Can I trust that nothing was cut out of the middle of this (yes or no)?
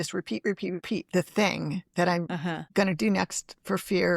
no